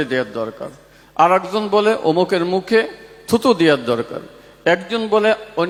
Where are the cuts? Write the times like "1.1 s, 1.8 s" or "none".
none

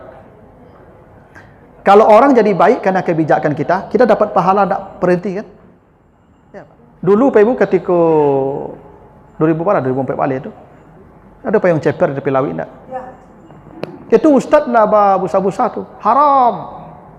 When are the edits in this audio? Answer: 6.7 s

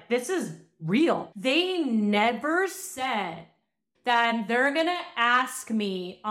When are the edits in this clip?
1.3 s, 3.8 s

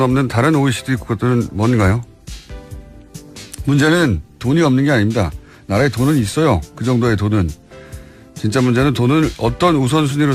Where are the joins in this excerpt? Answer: none

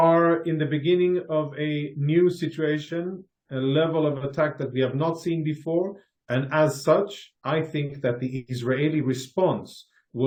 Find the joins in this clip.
none

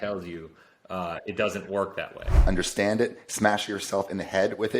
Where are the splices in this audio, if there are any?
2.3 s

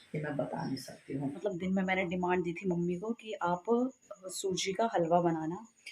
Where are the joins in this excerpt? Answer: 1.4 s

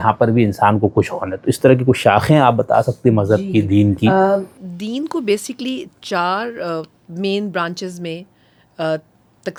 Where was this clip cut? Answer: none

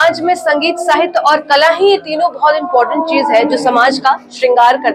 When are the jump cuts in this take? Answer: none

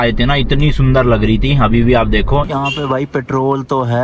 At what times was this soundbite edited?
2.5 s

